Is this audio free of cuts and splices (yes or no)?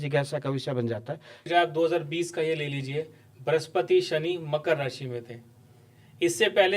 no